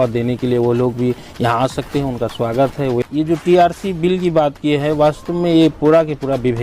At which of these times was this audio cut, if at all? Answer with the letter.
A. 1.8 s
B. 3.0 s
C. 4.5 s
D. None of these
B